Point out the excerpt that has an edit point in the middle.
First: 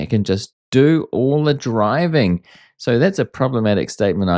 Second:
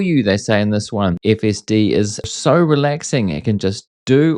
second; 2 cuts; at 1.2 s, 2.3 s

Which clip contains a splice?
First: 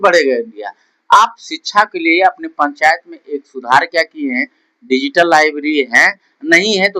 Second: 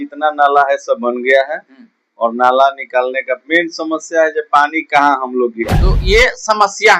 second; 1 cut; at 6.0 s

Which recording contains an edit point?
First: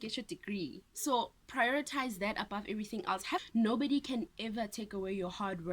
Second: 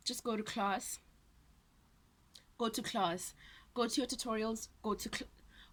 first; 1 cut; at 3.5 s

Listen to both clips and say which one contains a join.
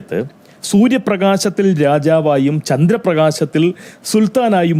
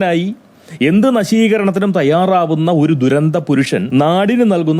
second; 1 cut; at 3.9 s

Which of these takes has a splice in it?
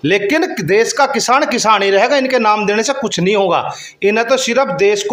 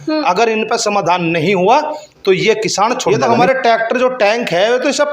second; 1 cut; at 3.0 s

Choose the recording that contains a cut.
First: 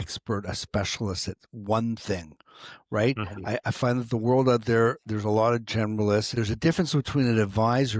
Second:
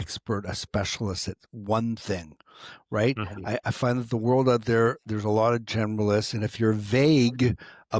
first; 1 cut; at 6.3 s

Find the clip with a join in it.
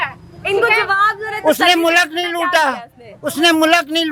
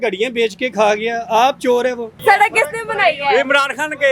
second; 1 cut; at 2.1 s

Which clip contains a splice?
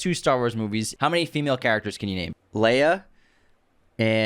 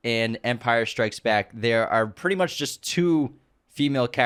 first; 2 cuts; at 0.9 s, 2.4 s

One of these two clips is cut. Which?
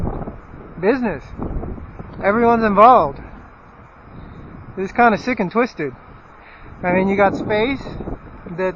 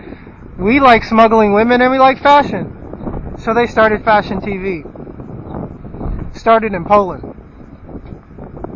first; 1 cut; at 6.7 s

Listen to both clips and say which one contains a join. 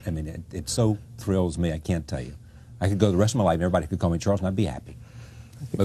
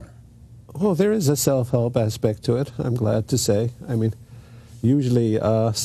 first; 1 cut; at 4.6 s

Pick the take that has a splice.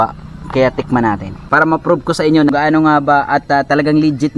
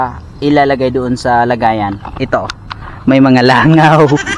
first; 2 cuts; at 1.3 s, 2.5 s

